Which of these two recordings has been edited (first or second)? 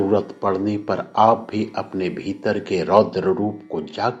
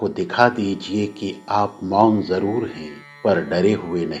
second